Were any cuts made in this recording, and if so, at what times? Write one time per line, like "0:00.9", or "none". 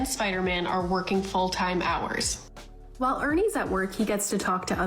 0:02.5